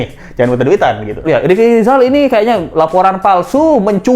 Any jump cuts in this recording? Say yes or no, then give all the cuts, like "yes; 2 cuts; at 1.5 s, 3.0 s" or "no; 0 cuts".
yes; 1 cut; at 1.2 s